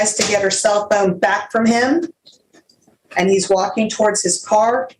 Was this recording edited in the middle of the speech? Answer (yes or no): no